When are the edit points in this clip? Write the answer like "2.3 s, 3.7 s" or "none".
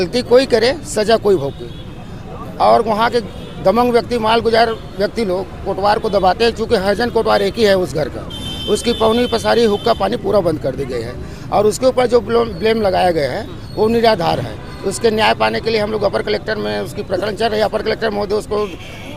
none